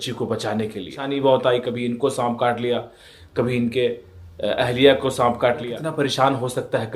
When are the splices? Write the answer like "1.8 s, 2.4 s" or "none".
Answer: 1.0 s, 5.8 s